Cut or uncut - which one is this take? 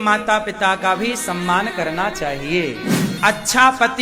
cut